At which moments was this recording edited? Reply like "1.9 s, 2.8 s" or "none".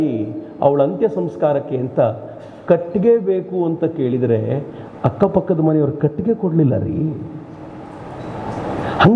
none